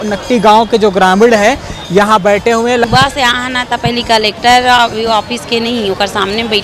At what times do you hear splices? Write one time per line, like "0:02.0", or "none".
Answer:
0:02.8